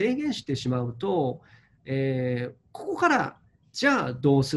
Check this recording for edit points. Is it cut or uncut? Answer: uncut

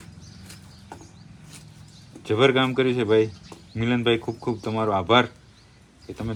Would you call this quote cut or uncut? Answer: uncut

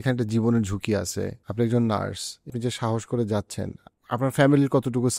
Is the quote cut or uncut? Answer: cut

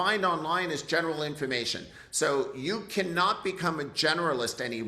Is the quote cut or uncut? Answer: uncut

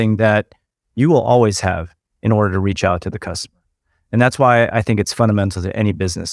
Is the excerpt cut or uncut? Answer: uncut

